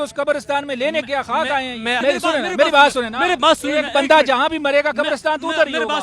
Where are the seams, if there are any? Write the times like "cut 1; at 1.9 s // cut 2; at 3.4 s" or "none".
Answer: cut 1; at 2.0 s